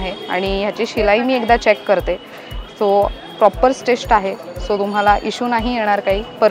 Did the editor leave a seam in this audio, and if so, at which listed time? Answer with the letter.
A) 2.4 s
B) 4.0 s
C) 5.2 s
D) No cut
D